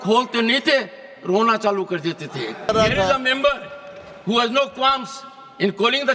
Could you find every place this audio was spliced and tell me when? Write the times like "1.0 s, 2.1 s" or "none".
2.7 s